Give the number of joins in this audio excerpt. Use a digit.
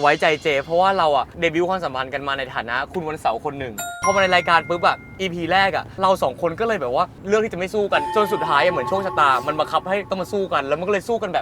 4